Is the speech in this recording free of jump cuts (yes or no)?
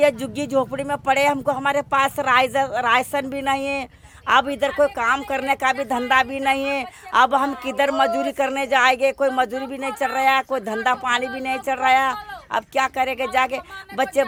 yes